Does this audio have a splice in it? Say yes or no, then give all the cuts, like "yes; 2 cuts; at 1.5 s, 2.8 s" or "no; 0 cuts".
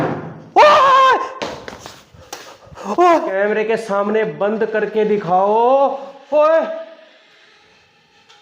yes; 1 cut; at 3.3 s